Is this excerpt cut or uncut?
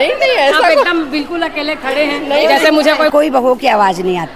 cut